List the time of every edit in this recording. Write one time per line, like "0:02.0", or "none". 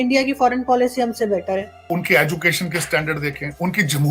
0:01.8